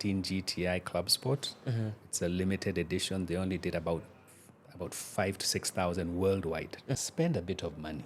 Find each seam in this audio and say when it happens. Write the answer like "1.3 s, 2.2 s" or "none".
7.0 s